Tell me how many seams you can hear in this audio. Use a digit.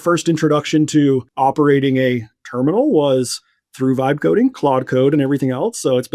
1